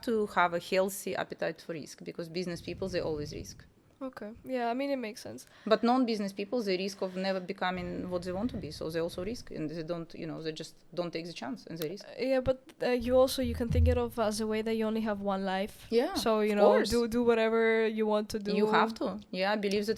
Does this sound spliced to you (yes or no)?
no